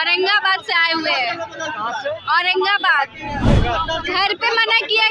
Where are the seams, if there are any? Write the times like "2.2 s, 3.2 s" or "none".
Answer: 3.5 s